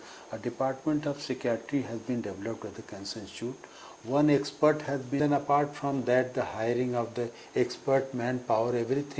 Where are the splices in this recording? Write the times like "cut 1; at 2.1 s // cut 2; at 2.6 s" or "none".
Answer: cut 1; at 5.2 s